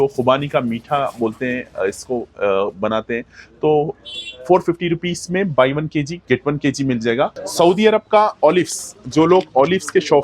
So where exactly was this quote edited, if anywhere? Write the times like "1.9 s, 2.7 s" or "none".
7.4 s

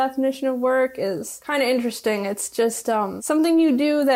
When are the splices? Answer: 3.2 s

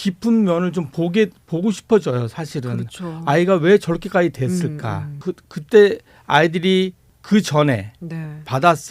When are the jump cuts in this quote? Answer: 5.1 s, 7.1 s

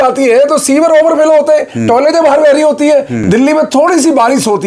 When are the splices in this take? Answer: 3.2 s

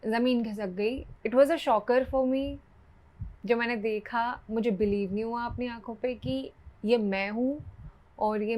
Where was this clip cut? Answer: 1.1 s

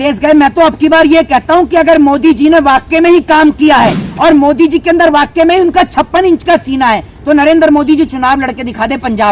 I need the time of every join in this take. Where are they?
none

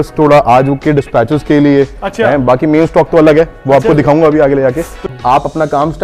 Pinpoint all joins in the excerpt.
4.9 s

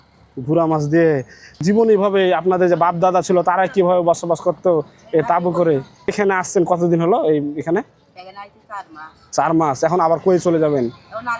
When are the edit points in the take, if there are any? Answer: 1.6 s, 6.1 s

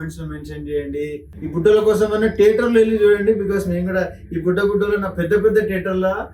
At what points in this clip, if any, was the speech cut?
1.3 s

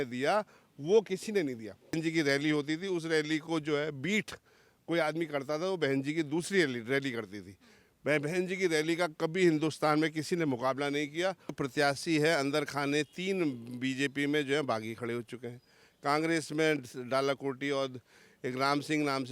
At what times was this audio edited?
2.0 s, 11.6 s

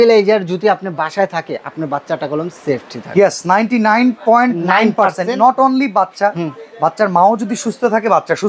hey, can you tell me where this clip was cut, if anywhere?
none

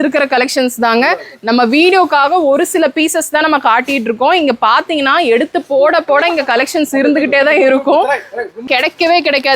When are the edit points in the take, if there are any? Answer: 8.6 s

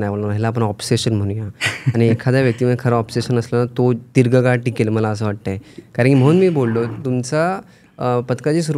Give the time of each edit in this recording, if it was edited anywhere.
none

